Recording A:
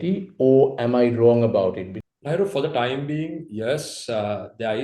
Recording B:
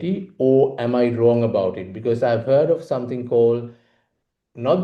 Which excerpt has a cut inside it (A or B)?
A